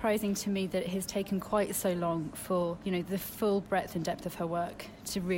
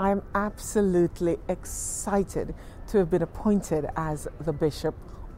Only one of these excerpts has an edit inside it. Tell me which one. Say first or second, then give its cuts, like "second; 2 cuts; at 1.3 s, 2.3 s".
first; 1 cut; at 2.8 s